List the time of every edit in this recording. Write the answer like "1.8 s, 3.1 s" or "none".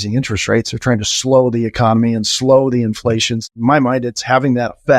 3.4 s